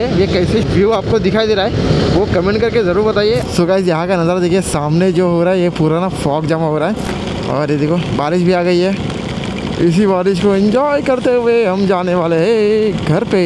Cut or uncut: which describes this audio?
cut